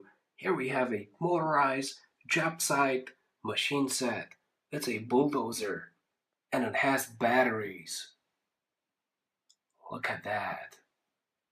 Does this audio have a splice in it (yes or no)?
no